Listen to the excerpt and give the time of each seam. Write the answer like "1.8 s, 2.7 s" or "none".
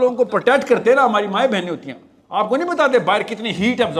none